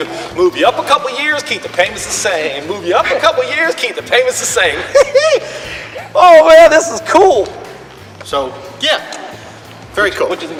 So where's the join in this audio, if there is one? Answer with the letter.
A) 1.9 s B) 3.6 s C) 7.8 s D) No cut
D